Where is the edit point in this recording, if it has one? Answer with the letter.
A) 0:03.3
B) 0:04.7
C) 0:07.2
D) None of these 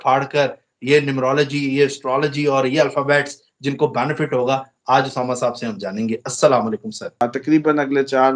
C